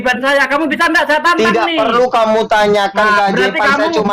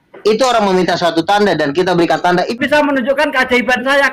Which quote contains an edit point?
second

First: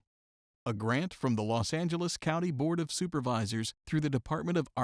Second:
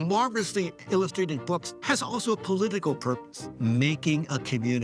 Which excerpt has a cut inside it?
second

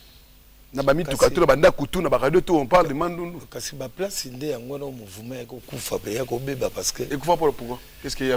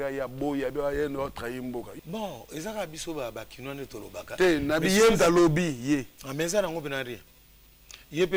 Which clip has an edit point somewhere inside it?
second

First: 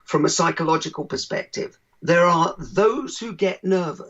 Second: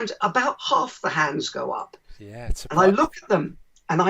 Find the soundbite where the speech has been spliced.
first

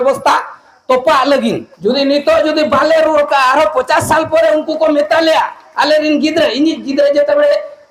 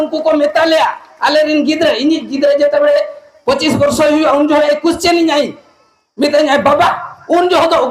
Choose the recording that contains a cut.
first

